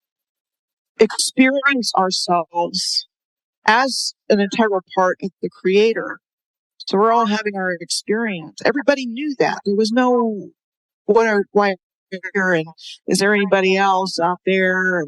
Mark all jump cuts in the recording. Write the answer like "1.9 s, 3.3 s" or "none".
none